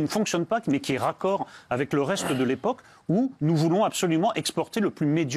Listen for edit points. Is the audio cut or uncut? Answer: uncut